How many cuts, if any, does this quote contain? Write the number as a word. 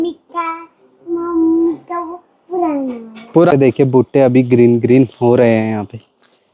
one